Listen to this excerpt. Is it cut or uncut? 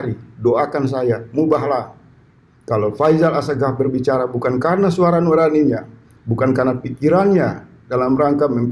uncut